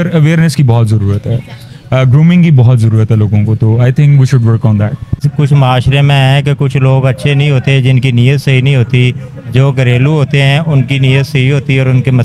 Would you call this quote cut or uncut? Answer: cut